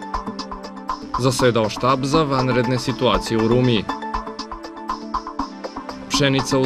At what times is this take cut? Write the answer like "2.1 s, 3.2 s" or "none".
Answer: 1.0 s